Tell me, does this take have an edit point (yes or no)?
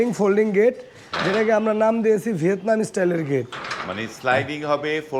no